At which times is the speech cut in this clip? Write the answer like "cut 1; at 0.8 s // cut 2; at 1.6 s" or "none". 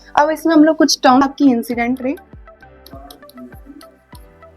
cut 1; at 1.2 s